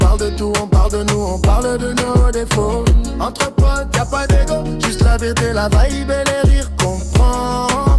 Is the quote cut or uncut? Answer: uncut